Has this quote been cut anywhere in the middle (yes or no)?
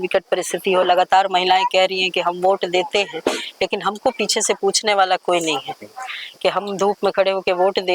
no